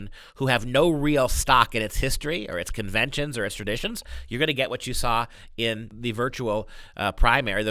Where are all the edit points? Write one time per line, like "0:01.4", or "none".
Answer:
0:05.9